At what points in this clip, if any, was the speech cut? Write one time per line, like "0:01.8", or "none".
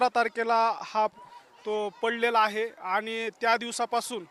0:01.1